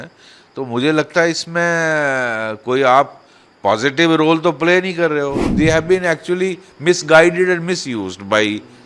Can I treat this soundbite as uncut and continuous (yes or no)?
no